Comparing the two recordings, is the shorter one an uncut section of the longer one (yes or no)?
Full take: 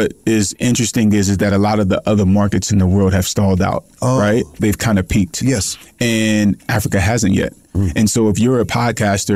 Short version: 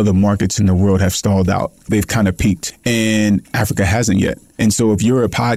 no